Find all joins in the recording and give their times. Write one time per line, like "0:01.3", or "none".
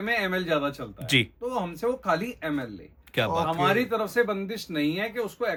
none